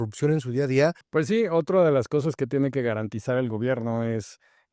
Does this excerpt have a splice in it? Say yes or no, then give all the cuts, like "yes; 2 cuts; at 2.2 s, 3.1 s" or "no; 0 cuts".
yes; 1 cut; at 1.0 s